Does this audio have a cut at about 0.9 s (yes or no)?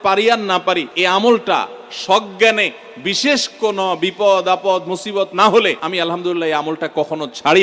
yes